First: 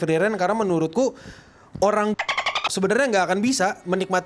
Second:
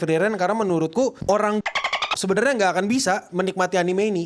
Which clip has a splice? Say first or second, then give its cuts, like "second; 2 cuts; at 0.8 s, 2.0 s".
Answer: second; 1 cut; at 1.2 s